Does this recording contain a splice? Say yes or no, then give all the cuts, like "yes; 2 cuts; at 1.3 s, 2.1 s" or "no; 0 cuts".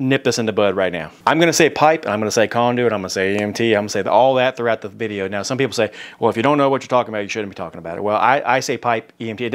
yes; 1 cut; at 1.1 s